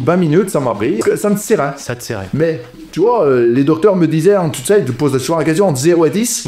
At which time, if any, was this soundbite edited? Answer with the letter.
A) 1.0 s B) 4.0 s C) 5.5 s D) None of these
A